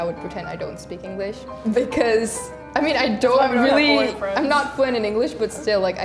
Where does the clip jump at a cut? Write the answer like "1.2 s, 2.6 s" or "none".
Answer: none